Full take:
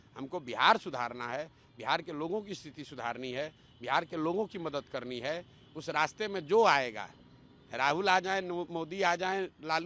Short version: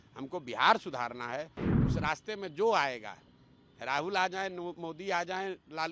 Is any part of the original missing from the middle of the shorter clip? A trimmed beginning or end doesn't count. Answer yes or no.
yes